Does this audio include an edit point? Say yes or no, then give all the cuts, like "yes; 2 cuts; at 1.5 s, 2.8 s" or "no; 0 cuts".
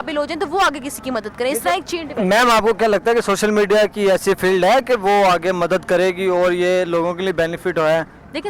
no; 0 cuts